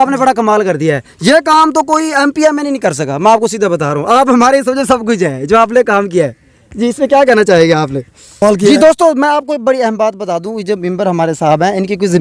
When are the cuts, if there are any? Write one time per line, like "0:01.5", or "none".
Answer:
0:08.4